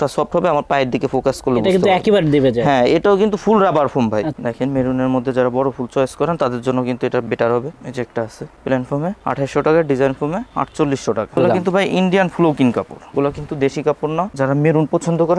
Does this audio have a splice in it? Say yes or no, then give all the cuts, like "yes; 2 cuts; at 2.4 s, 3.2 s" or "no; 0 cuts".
yes; 4 cuts; at 4.3 s, 7.7 s, 11.4 s, 14.3 s